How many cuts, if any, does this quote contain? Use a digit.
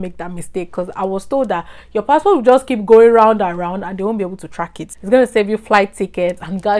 1